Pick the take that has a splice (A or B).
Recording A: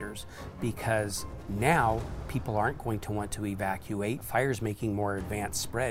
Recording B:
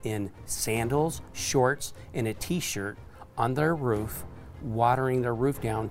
A